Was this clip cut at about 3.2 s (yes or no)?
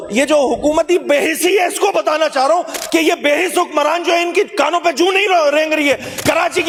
no